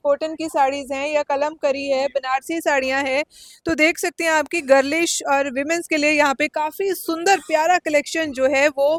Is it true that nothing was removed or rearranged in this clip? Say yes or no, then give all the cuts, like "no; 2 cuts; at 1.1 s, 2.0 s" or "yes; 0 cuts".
yes; 0 cuts